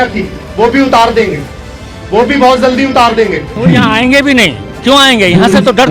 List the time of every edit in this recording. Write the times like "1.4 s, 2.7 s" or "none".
3.6 s